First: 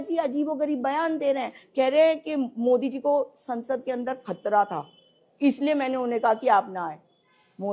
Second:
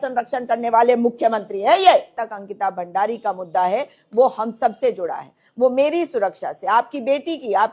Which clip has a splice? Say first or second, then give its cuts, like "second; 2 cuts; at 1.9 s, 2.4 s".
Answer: second; 1 cut; at 2.1 s